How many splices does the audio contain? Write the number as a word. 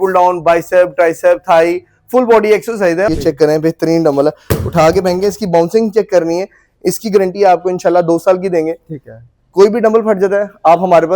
one